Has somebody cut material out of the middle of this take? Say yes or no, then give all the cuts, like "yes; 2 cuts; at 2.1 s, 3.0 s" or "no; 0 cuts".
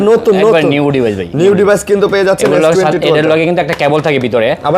no; 0 cuts